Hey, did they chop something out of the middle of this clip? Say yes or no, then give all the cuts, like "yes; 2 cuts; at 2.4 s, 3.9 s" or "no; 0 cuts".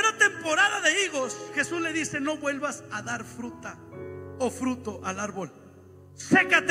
no; 0 cuts